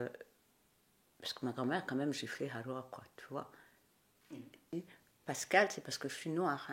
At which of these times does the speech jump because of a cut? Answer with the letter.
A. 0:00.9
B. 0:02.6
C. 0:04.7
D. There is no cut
C